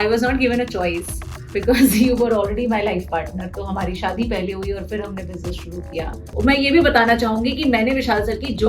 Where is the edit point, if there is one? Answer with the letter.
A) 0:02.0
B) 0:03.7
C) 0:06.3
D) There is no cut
C